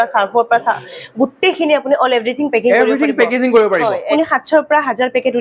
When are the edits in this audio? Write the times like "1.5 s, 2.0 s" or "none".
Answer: 4.1 s

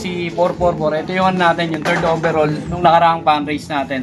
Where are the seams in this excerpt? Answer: 2.8 s

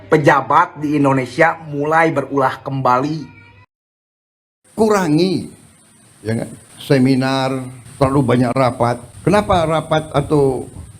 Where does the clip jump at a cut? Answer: 4.2 s

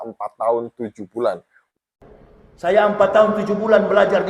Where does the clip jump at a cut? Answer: 1.6 s

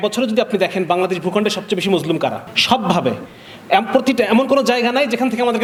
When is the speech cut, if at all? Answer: none

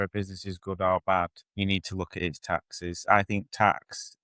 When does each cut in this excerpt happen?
1.4 s

